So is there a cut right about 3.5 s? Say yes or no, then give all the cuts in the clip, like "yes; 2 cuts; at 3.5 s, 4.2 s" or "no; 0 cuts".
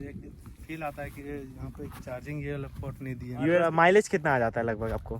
yes; 1 cut; at 3.5 s